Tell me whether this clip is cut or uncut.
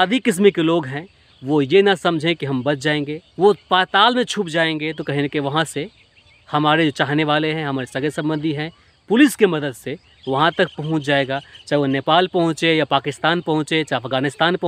cut